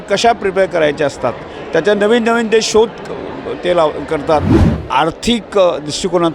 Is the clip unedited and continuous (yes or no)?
no